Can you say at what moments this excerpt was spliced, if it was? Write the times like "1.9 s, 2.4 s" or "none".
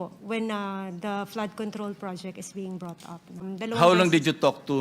3.4 s